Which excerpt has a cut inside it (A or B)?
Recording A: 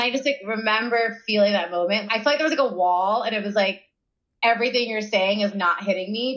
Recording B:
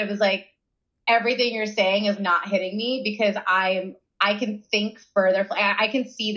B